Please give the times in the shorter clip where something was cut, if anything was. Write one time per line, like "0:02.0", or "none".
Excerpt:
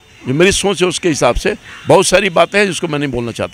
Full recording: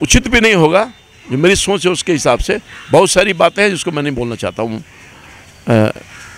none